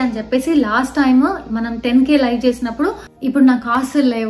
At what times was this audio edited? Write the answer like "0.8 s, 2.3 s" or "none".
3.1 s

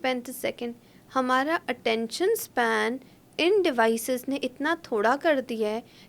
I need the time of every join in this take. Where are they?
none

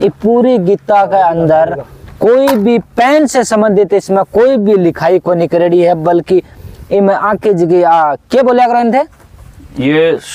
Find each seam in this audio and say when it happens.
none

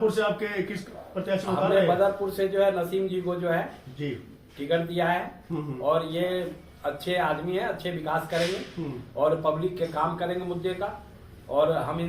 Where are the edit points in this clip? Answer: 2.7 s

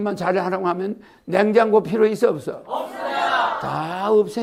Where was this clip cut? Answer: none

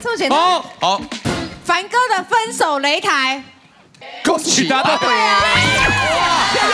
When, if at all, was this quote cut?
none

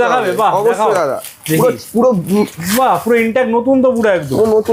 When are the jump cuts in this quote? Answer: none

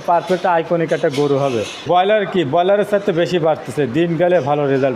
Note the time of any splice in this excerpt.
1.8 s

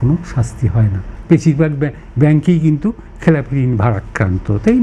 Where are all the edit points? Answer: 1.1 s

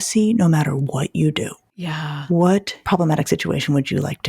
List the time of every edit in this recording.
1.6 s, 2.7 s

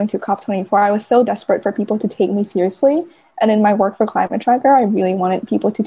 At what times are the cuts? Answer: none

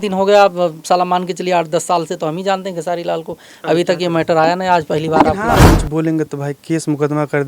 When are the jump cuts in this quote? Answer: 5.6 s

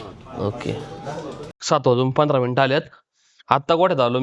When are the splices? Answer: 1.6 s

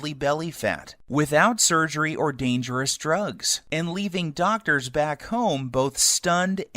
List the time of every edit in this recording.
2.3 s

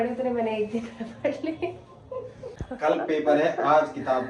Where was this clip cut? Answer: 2.6 s

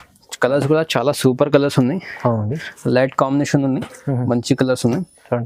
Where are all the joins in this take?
none

